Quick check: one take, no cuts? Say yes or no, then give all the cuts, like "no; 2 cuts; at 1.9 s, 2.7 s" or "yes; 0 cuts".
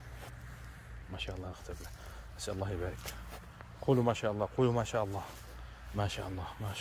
yes; 0 cuts